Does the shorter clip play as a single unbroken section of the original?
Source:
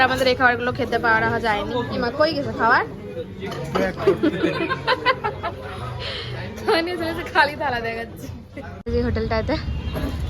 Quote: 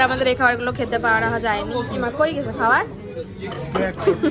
yes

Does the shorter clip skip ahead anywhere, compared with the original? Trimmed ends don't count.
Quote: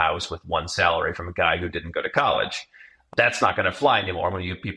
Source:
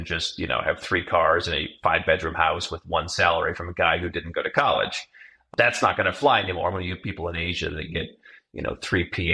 no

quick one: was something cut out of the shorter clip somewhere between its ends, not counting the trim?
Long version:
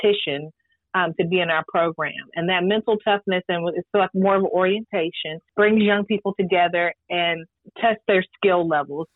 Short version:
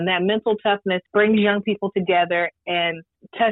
yes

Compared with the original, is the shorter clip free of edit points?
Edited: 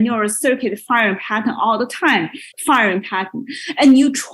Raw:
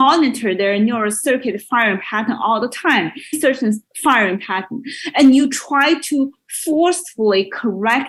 no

